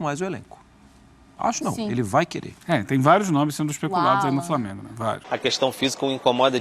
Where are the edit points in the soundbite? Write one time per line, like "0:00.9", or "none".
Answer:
0:05.3